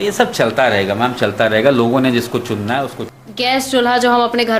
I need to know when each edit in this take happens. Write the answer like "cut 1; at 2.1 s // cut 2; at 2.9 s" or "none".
cut 1; at 3.0 s